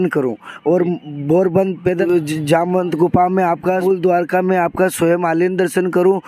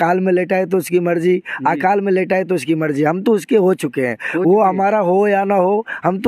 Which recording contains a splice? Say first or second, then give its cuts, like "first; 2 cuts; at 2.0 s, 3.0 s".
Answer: first; 2 cuts; at 2.0 s, 3.8 s